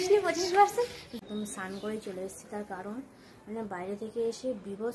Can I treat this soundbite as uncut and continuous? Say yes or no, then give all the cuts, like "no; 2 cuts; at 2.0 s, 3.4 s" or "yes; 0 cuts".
no; 1 cut; at 1.2 s